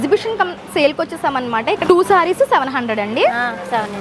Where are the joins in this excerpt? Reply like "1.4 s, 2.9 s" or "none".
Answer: 1.8 s